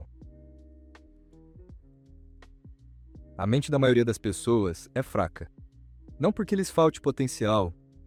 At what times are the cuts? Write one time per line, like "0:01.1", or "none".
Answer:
none